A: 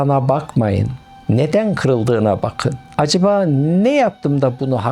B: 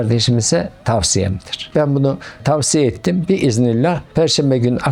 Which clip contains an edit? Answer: B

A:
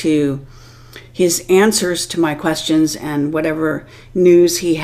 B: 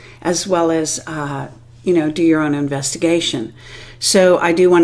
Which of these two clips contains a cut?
A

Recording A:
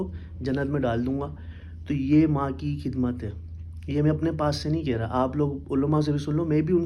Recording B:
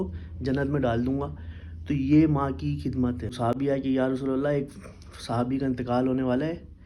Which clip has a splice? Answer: B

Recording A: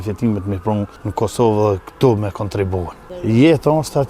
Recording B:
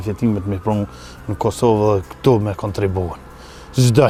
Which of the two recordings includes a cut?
A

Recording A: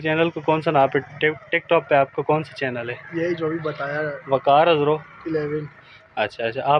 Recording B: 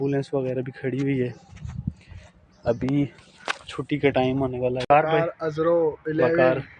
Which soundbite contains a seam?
B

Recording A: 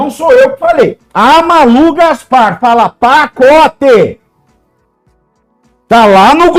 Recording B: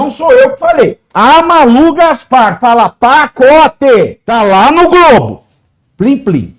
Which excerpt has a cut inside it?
B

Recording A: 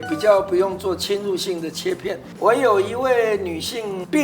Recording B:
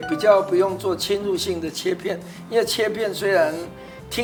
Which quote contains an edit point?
A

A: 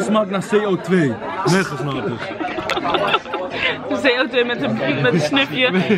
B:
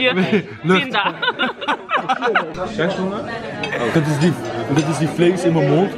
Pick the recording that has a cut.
B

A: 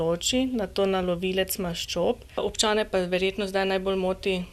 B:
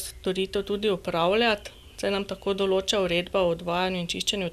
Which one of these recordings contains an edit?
A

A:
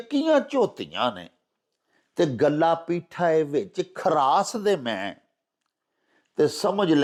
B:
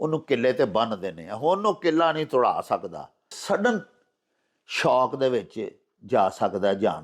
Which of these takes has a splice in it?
B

